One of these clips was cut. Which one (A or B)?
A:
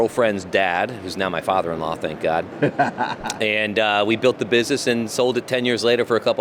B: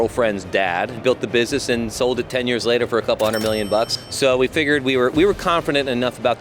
B